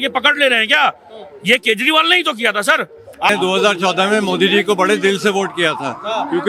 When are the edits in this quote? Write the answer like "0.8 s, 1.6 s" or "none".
3.3 s